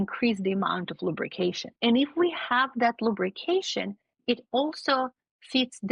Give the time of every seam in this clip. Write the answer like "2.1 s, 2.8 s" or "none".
1.7 s

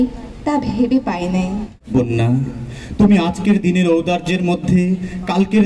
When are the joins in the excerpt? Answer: 1.7 s

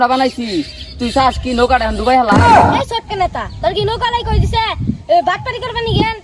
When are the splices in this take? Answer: 2.3 s, 2.9 s

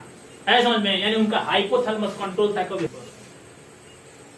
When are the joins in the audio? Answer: 2.9 s

